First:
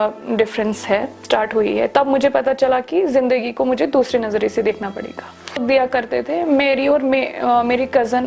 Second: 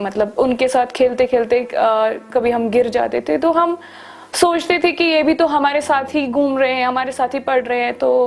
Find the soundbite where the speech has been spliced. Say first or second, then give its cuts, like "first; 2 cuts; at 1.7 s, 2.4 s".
first; 2 cuts; at 1.2 s, 5.6 s